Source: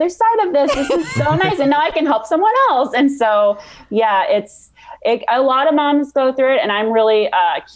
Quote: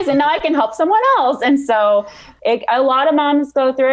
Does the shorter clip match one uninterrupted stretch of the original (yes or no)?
no